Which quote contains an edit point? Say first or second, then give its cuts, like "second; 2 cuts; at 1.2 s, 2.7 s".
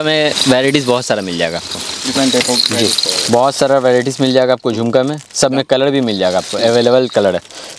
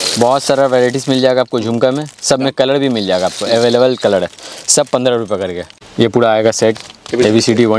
second; 1 cut; at 5.7 s